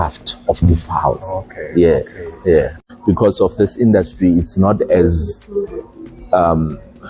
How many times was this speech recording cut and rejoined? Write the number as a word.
one